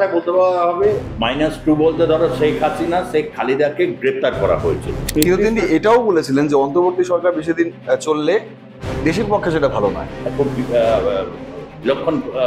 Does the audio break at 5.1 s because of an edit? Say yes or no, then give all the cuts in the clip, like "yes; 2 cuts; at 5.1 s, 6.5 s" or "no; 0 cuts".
yes; 2 cuts; at 1.1 s, 5.1 s